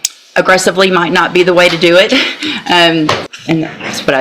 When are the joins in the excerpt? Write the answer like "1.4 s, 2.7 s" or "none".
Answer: 3.3 s